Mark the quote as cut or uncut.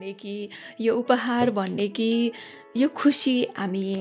uncut